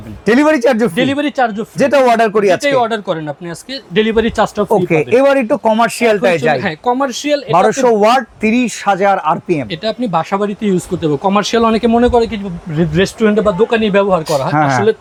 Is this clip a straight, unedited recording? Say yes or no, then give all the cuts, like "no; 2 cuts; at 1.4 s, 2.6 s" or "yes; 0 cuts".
yes; 0 cuts